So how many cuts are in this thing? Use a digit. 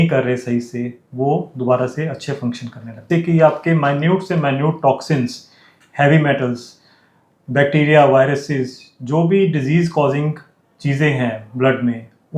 1